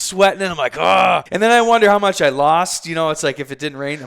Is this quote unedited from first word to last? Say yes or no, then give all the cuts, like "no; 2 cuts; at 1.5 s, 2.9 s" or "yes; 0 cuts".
no; 1 cut; at 1.3 s